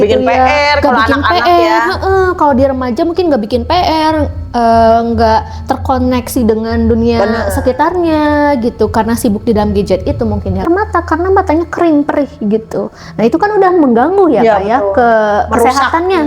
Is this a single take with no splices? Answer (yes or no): no